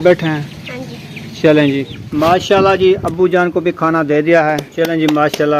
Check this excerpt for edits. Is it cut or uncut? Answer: cut